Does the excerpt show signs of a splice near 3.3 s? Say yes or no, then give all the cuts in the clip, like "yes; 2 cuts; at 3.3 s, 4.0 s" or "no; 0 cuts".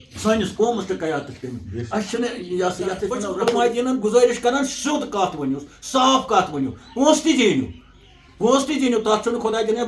yes; 1 cut; at 3.3 s